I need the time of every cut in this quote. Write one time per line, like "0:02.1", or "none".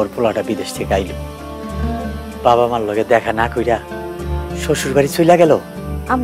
none